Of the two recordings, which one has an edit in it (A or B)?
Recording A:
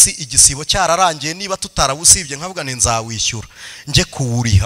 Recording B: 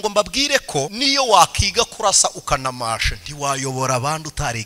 B